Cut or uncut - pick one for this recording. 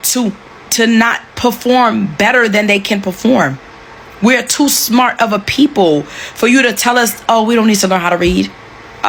uncut